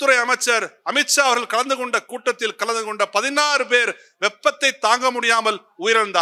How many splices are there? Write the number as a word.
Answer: zero